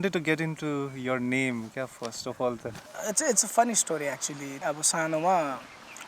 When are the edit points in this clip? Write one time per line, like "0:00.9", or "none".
0:02.9
0:04.6